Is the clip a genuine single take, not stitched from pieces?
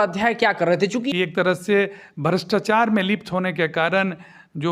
no; 1 cut; at 1.1 s

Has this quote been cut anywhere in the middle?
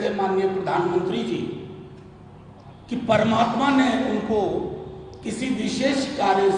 no; 0 cuts

